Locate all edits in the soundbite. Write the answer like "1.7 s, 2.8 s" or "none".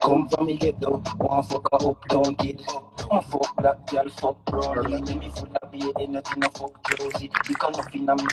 none

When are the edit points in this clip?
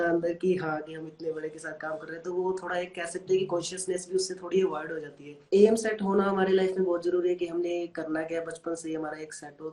5.4 s

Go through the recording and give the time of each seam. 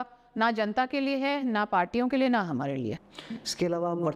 none

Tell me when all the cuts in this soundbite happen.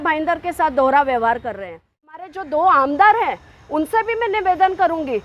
2.2 s

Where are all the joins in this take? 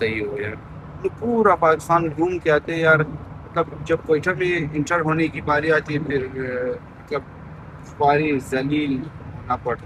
none

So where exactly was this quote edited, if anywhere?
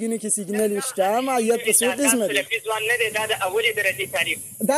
2.3 s

